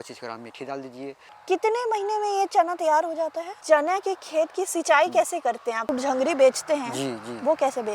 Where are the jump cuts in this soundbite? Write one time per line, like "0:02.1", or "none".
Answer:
0:01.3
0:03.5
0:05.9